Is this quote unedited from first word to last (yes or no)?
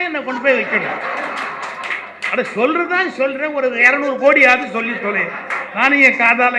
yes